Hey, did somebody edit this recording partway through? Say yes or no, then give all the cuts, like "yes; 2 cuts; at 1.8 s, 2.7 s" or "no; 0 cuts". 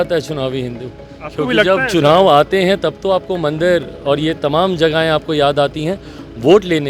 no; 0 cuts